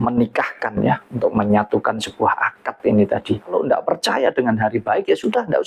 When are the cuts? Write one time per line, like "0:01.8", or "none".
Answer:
0:03.5